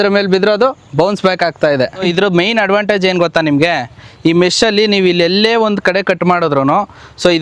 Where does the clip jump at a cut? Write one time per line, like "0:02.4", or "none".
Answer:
0:02.1